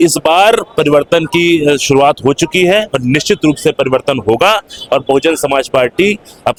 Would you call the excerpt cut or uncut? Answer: uncut